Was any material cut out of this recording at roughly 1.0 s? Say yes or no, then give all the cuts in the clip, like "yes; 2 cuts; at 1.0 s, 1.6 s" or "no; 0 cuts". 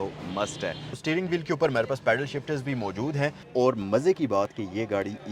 yes; 2 cuts; at 1.0 s, 3.4 s